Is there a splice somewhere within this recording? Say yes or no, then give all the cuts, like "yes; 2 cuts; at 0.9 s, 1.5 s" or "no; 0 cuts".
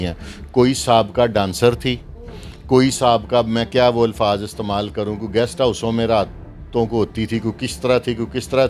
no; 0 cuts